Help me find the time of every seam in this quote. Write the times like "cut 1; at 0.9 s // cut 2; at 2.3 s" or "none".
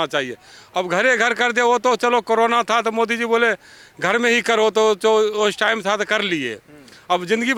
none

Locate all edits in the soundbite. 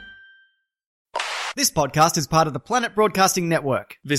cut 1; at 0.9 s

